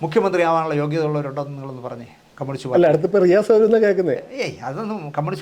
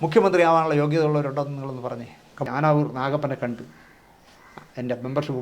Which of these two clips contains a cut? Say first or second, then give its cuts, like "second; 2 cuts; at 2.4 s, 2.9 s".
second; 1 cut; at 2.5 s